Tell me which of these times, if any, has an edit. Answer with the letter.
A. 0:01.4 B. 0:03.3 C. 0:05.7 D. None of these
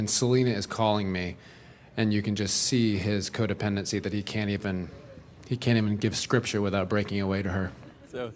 B